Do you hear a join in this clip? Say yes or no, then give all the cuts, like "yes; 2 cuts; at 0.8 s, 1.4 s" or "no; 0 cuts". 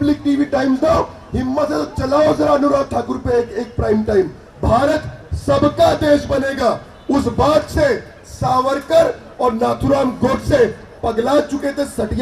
yes; 1 cut; at 4.4 s